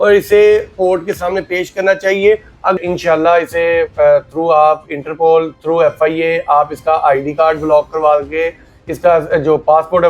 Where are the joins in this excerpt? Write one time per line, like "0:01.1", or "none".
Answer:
0:02.8